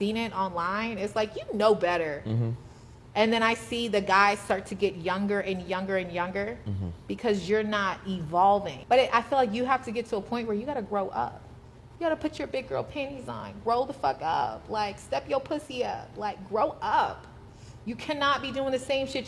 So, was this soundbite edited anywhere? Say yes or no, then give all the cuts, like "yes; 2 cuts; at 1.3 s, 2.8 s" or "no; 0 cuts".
yes; 1 cut; at 8.7 s